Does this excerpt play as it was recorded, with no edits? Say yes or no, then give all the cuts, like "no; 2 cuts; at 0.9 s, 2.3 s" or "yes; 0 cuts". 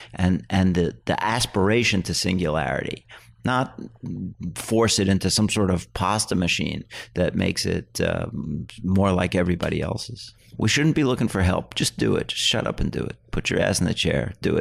no; 1 cut; at 10.5 s